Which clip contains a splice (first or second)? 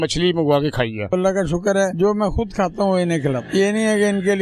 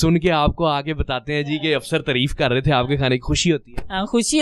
first